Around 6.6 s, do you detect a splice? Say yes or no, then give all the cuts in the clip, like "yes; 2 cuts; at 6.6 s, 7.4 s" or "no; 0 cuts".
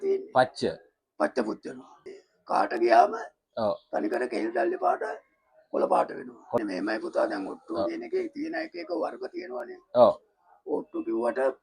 yes; 2 cuts; at 2.0 s, 6.6 s